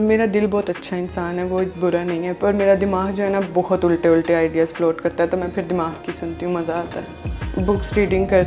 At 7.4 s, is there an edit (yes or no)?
yes